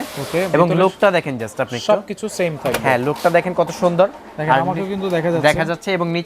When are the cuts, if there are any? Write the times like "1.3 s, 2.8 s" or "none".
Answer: none